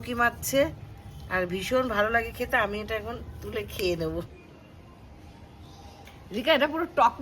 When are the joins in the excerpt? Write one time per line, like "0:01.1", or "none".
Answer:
0:04.2
0:06.1